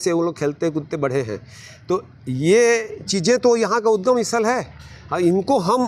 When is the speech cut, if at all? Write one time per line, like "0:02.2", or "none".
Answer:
none